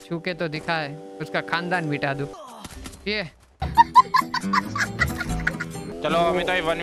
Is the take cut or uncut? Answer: cut